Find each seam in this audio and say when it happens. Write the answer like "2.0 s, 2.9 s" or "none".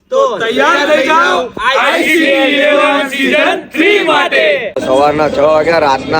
4.8 s